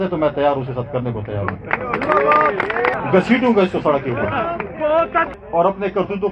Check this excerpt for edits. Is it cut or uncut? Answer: cut